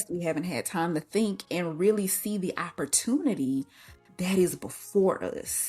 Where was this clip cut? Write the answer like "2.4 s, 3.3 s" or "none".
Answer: none

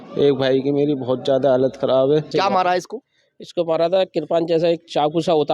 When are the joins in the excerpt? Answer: 2.3 s

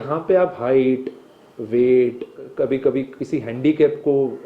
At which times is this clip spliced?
2.4 s

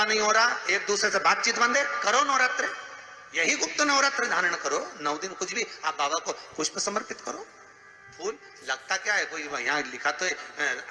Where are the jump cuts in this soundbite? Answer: none

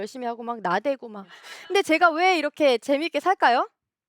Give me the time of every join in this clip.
1.4 s

